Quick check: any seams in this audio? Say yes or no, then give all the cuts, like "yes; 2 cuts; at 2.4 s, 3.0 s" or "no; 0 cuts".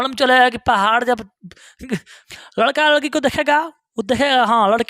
yes; 1 cut; at 2.2 s